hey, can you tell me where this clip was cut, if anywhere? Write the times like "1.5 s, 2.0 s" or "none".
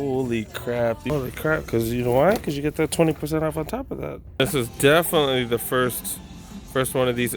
1.1 s, 4.4 s